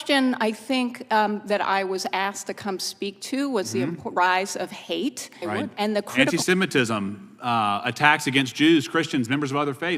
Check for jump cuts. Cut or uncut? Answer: cut